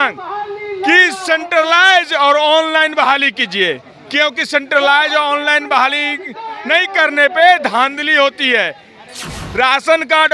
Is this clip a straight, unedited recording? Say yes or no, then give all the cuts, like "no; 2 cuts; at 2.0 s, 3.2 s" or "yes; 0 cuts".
yes; 0 cuts